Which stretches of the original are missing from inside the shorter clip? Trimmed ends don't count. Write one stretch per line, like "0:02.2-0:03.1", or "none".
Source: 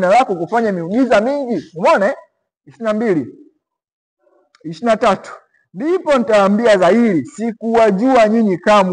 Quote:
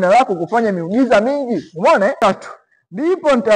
0:02.2-0:05.0